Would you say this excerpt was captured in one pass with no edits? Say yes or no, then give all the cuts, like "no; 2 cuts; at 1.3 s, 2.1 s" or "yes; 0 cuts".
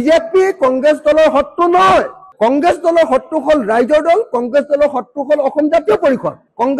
yes; 0 cuts